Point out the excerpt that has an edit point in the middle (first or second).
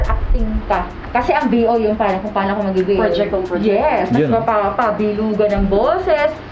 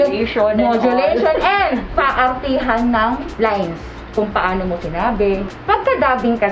second